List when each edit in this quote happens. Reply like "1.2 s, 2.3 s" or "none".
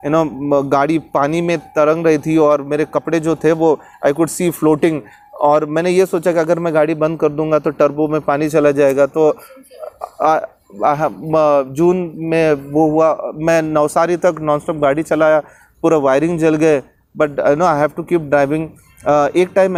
none